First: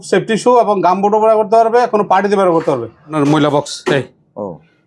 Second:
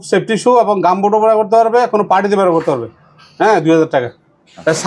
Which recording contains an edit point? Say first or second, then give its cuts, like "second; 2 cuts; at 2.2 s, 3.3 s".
first; 1 cut; at 3.1 s